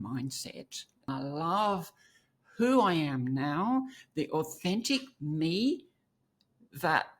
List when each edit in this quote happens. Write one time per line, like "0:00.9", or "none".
0:01.1